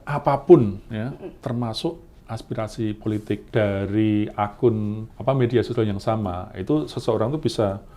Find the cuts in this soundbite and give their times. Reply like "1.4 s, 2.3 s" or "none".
3.4 s